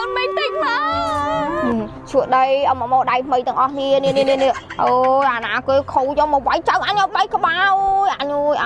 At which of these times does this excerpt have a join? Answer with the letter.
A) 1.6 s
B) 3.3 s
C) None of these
A